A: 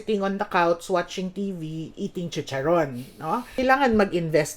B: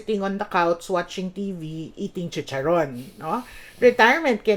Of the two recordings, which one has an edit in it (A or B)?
A